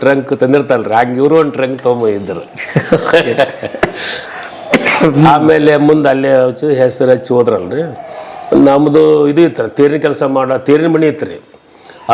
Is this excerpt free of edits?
yes; 0 cuts

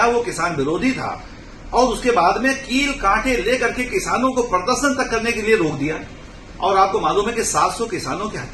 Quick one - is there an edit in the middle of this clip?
no; 0 cuts

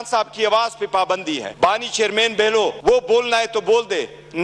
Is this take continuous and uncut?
no; 2 cuts; at 1.5 s, 2.8 s

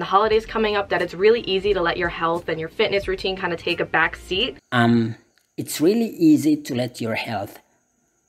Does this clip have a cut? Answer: no; 0 cuts

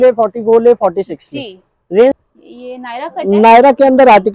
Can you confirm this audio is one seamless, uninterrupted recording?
no; 1 cut; at 2.2 s

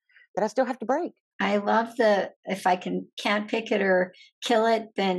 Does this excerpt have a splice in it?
yes; 1 cut; at 1.2 s

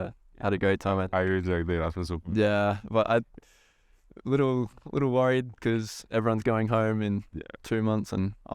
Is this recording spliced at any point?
no; 0 cuts

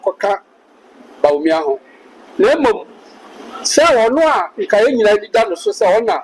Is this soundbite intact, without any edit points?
yes; 0 cuts

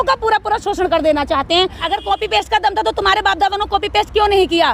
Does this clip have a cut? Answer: yes; 1 cut; at 1.8 s

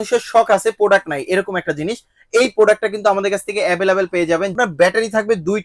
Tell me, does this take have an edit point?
yes; 1 cut; at 4.6 s

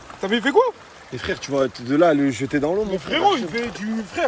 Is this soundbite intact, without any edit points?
yes; 0 cuts

